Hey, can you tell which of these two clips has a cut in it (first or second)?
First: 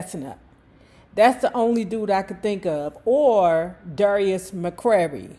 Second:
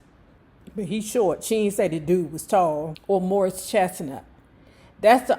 second